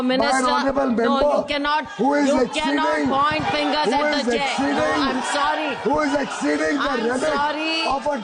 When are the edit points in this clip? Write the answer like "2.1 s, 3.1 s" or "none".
none

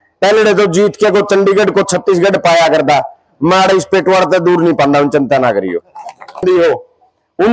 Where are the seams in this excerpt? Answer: 6.4 s

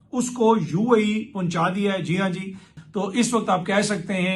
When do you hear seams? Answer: 2.8 s

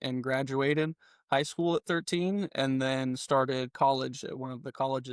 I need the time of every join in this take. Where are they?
none

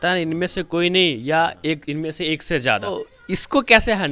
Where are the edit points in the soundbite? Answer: 3.1 s

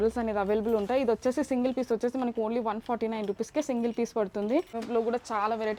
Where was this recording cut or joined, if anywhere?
4.7 s

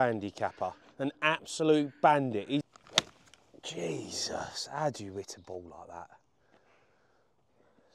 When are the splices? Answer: 2.6 s

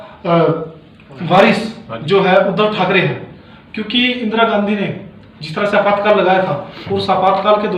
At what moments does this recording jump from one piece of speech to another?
none

